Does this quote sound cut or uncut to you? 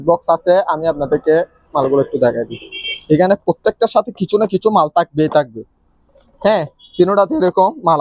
uncut